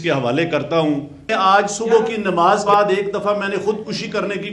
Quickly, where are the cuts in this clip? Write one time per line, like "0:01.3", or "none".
0:01.3
0:02.6